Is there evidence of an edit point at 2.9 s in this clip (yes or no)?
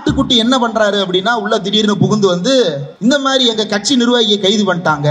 yes